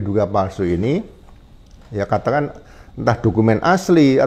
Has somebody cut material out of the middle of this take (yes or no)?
no